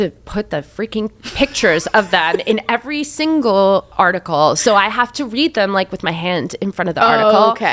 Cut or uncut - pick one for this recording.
uncut